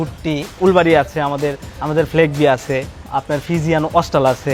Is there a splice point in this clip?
no; 0 cuts

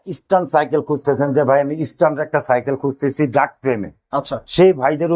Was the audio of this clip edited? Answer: no; 0 cuts

